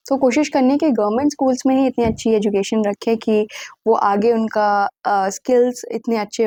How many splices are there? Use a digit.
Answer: 0